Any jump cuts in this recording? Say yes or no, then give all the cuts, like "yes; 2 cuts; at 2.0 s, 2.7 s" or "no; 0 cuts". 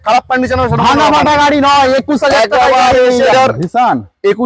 yes; 1 cut; at 3.3 s